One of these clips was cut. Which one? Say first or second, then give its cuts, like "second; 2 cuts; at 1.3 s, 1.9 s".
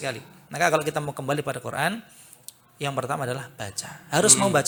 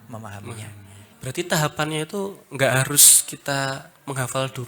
second; 1 cut; at 1.1 s